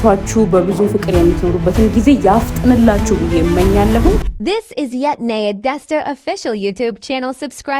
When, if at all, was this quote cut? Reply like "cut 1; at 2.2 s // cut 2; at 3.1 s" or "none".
cut 1; at 4.2 s